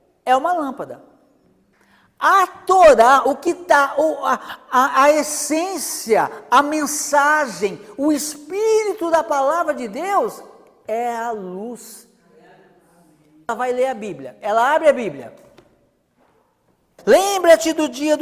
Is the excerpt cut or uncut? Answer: cut